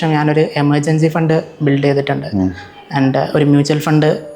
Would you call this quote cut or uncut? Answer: uncut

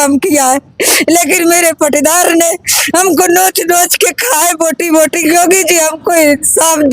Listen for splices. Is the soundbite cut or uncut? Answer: cut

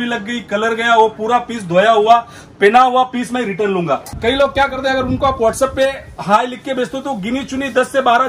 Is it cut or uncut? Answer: cut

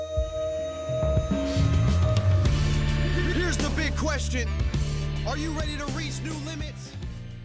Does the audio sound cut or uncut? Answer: uncut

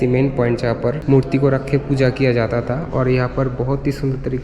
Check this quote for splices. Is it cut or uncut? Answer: cut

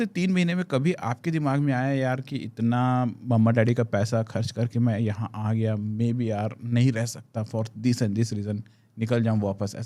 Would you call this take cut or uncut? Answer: uncut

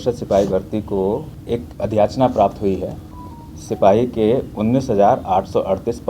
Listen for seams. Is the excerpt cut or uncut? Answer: cut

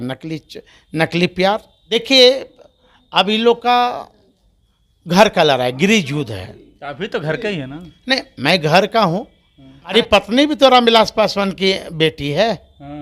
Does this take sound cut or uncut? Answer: cut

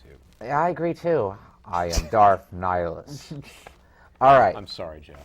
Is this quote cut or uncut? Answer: cut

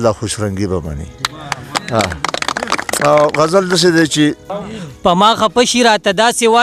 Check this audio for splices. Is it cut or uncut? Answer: cut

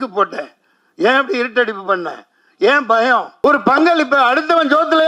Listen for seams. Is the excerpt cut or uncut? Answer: cut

